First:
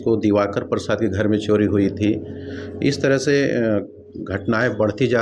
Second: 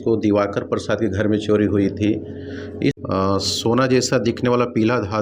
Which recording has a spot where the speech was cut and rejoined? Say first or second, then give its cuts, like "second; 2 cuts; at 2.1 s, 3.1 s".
second; 1 cut; at 3.0 s